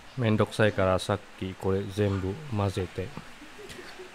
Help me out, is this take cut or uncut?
uncut